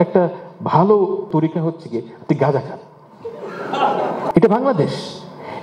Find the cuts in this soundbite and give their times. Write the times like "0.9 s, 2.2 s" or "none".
1.3 s, 4.3 s